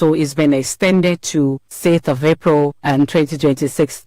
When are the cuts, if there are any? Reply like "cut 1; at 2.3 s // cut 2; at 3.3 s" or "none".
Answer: cut 1; at 1.7 s // cut 2; at 2.8 s